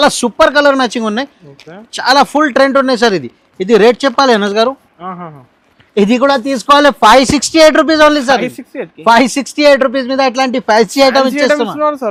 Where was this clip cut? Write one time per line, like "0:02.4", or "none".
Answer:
none

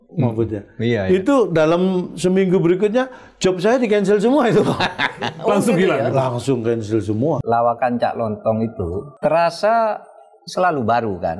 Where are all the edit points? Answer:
0:07.4
0:09.1

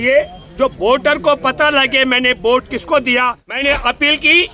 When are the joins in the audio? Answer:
0:03.4

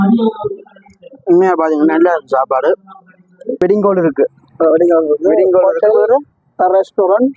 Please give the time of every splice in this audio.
0:03.6

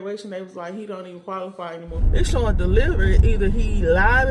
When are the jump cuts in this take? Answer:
0:01.9

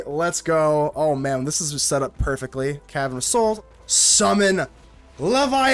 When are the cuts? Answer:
0:03.6

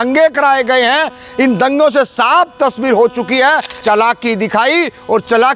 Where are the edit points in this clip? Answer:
0:03.7

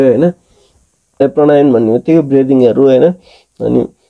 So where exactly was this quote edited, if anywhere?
0:01.1

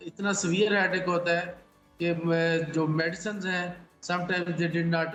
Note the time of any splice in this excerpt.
none

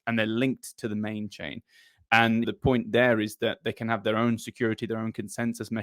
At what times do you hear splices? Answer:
none

